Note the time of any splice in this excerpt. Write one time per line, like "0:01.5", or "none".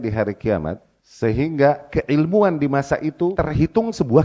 0:03.4